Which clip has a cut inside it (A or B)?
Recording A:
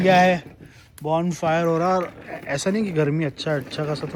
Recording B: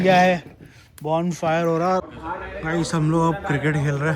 B